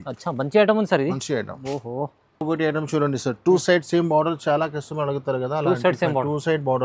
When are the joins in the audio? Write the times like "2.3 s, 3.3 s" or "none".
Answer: none